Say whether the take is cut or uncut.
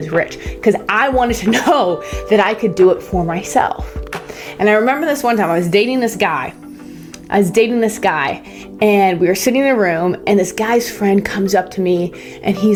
uncut